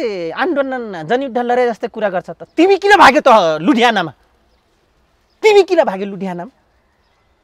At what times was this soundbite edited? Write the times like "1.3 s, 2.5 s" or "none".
none